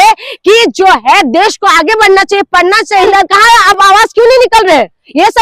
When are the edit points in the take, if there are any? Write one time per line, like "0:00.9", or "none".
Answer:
0:03.1